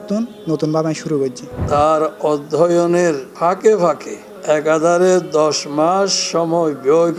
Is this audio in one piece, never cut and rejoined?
no; 1 cut; at 1.6 s

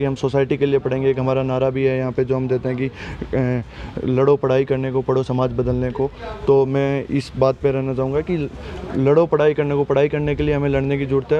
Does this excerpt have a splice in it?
no; 0 cuts

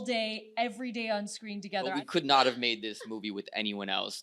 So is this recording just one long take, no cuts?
no; 1 cut; at 1.9 s

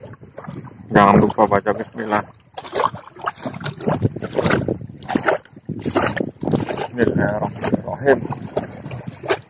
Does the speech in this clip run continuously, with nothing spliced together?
yes; 0 cuts

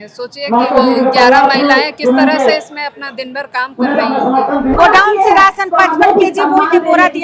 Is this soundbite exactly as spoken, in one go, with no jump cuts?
no; 1 cut; at 4.7 s

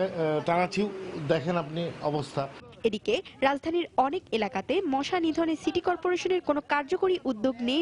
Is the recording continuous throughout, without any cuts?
yes; 0 cuts

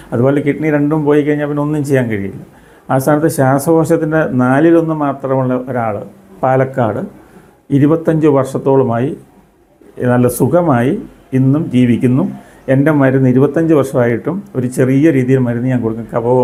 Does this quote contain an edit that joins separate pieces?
no; 0 cuts

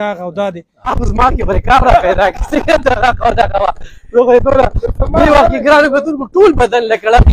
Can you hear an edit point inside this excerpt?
yes; 1 cut; at 0.9 s

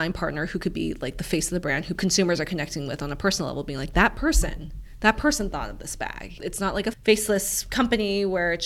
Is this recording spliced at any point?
yes; 2 cuts; at 1.9 s, 7.0 s

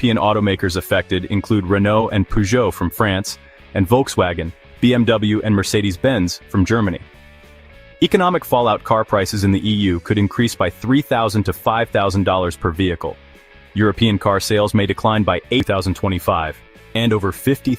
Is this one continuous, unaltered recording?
no; 1 cut; at 15.6 s

